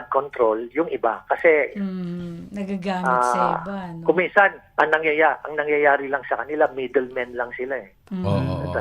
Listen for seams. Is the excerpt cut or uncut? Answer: uncut